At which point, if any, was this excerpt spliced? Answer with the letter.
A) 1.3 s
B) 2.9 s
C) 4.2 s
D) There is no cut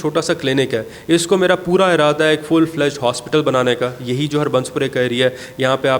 D